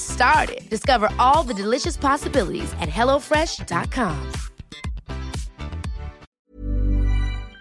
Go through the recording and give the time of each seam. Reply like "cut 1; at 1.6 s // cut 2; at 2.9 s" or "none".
cut 1; at 6.3 s